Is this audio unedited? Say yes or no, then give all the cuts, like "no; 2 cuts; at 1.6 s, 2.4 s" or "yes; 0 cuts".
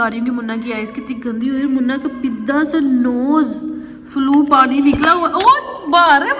yes; 0 cuts